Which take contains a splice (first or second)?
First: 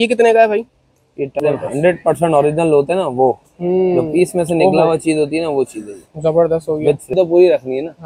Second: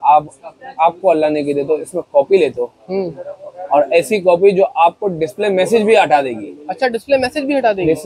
first